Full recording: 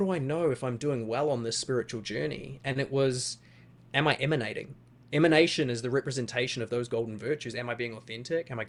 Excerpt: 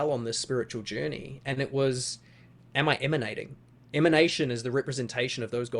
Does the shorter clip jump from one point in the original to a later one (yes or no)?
no